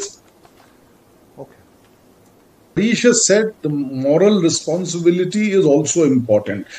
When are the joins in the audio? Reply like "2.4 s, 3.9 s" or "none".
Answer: 2.8 s